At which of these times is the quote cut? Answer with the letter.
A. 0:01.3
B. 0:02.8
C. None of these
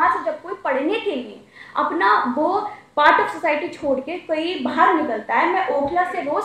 C